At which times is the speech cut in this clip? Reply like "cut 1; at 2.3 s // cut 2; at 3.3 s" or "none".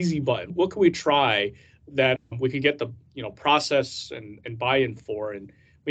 none